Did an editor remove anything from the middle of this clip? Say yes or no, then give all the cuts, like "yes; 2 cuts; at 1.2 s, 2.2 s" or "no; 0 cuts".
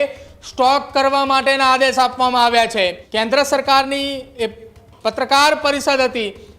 yes; 1 cut; at 3.0 s